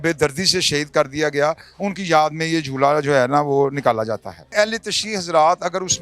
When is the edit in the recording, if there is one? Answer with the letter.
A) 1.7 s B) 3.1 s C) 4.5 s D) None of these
C